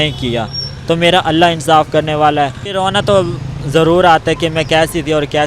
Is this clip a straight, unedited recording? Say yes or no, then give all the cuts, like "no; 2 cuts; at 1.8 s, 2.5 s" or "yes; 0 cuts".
no; 1 cut; at 2.8 s